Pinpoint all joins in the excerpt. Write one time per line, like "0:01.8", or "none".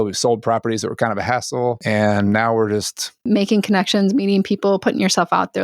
0:03.2